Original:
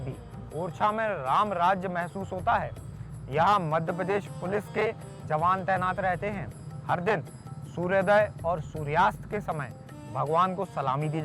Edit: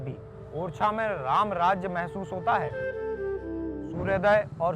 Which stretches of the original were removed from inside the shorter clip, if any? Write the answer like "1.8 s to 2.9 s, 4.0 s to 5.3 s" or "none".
3.3 s to 7.2 s